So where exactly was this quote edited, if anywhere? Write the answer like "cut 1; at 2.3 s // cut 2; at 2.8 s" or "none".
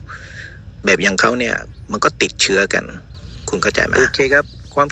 cut 1; at 3.9 s